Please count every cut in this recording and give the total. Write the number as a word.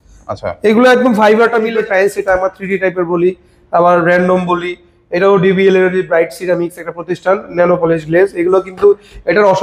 one